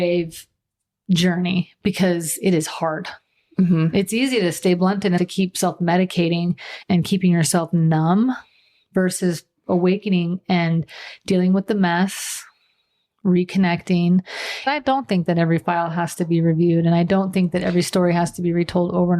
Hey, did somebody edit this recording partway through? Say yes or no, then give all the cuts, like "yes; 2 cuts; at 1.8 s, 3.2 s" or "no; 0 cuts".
yes; 3 cuts; at 5.2 s, 6.8 s, 14.7 s